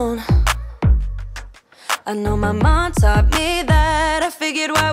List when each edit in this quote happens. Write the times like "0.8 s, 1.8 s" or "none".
none

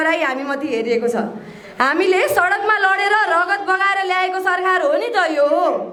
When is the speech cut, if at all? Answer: none

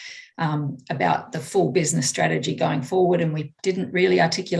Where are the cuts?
none

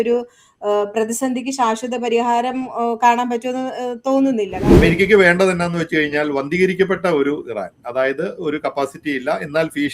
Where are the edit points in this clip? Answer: 4.5 s

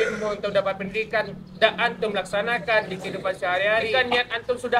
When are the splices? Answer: 3.9 s

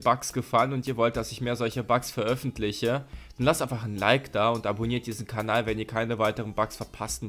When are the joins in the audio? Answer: none

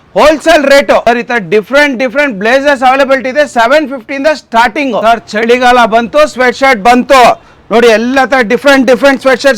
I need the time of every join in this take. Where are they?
5.0 s

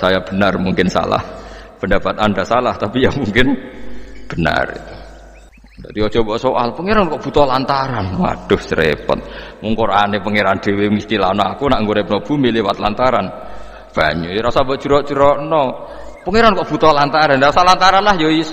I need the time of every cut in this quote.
5.5 s

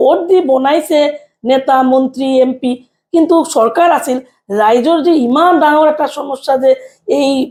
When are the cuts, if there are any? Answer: none

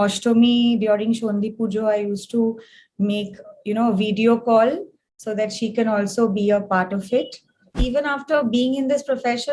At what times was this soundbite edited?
7.8 s

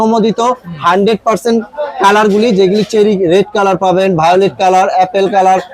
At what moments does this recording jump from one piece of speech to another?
none

